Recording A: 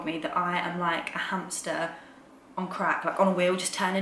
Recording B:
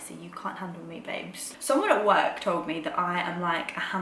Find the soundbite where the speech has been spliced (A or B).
B